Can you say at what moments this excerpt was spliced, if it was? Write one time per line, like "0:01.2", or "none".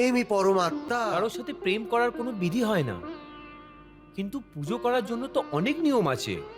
0:01.0